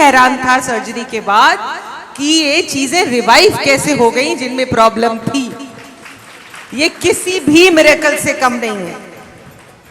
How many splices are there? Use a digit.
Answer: 1